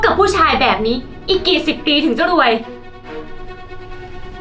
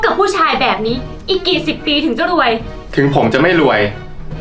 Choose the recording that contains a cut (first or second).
second